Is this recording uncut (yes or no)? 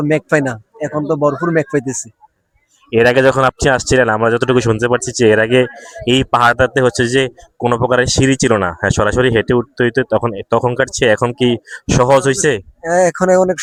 yes